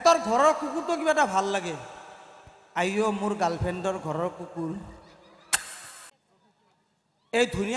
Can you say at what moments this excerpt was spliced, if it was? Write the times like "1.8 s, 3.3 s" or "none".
6.1 s